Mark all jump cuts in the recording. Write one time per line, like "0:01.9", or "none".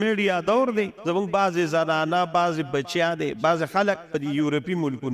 0:01.0
0:04.1